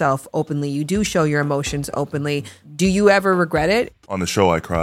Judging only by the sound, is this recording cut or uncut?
cut